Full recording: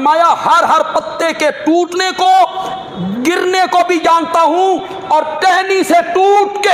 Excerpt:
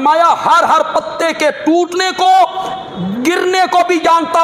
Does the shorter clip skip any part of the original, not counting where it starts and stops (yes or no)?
no